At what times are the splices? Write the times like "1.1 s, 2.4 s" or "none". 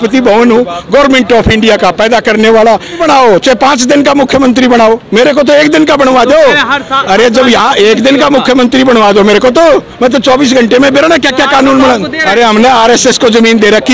3.0 s, 12.2 s